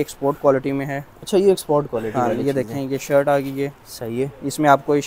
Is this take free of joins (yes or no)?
yes